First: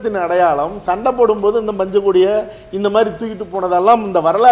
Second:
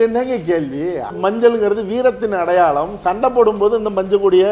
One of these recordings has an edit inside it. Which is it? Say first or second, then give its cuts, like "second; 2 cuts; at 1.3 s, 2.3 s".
second; 1 cut; at 1.1 s